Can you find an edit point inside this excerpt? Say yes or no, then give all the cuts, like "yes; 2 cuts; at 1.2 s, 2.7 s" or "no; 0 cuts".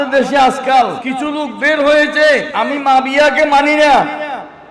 yes; 2 cuts; at 1.1 s, 2.5 s